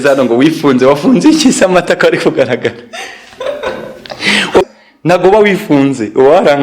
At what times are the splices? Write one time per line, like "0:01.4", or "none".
0:04.7